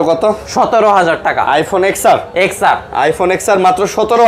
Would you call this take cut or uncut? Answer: uncut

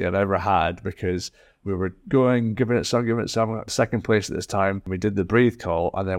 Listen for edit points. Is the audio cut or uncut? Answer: cut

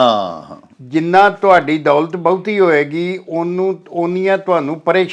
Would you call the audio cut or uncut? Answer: uncut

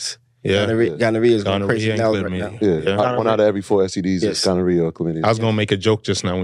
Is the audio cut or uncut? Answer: uncut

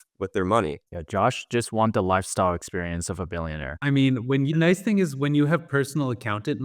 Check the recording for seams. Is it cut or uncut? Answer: cut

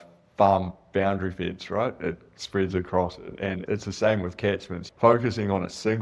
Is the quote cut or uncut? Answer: cut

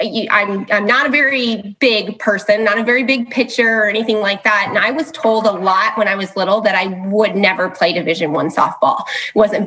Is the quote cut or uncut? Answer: uncut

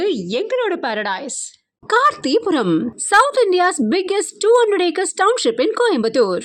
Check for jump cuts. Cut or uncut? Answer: uncut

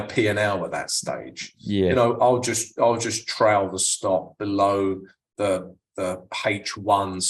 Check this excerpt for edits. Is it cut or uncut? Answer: uncut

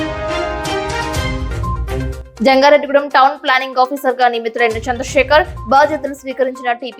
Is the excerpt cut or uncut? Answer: cut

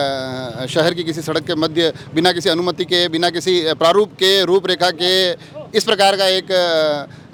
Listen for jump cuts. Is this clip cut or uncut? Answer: uncut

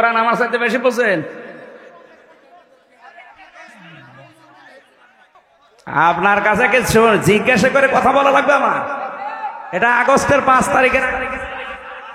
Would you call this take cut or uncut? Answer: cut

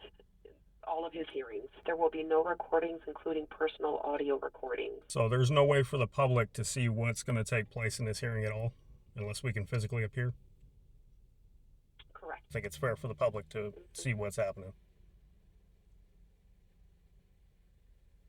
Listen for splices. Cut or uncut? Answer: cut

